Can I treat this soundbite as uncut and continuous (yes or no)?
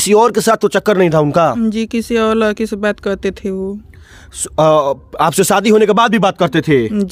yes